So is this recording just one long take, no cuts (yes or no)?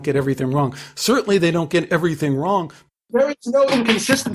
yes